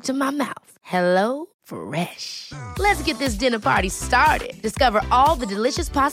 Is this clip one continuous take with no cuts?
yes; 0 cuts

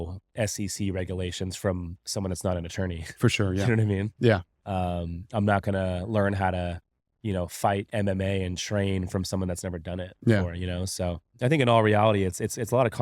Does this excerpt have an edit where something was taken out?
no; 0 cuts

